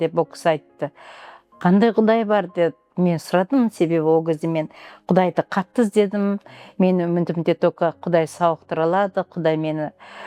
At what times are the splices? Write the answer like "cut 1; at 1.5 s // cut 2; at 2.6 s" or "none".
none

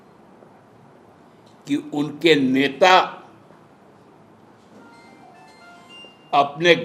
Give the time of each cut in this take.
none

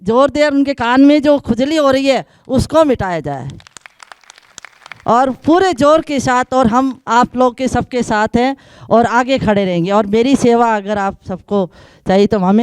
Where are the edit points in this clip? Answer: none

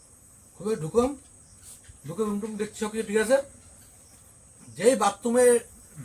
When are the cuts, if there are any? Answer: none

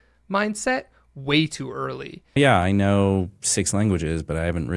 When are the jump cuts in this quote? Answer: cut 1; at 2.4 s

